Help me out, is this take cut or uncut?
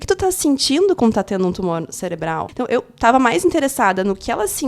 cut